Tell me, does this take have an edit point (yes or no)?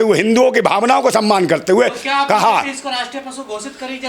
no